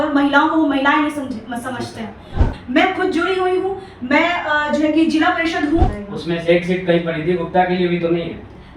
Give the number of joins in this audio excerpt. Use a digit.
2